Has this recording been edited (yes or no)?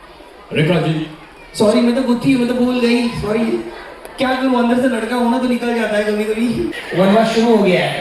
yes